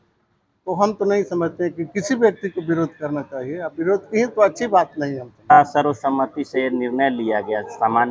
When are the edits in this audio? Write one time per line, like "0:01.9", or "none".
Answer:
0:05.6